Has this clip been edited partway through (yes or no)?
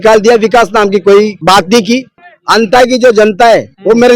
yes